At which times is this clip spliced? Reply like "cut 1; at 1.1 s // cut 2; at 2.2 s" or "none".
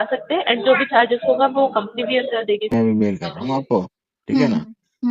cut 1; at 2.7 s